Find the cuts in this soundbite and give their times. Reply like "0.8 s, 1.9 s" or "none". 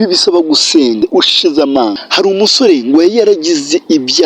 1.0 s, 2.1 s